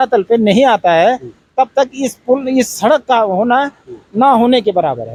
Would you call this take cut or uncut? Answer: uncut